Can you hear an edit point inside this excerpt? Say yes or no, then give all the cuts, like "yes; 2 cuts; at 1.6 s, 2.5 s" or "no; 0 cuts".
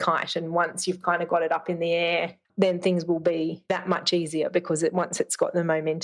yes; 1 cut; at 3.7 s